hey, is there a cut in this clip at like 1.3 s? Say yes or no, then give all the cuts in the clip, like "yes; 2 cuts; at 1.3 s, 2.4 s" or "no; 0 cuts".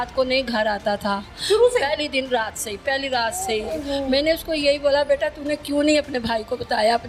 no; 0 cuts